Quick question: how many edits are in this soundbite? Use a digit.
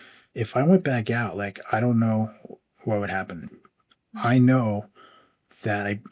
1